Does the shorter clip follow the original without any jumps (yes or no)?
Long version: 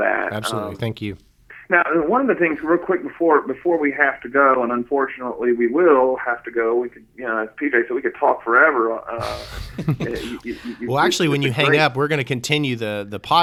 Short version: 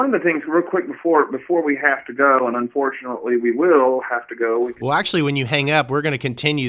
no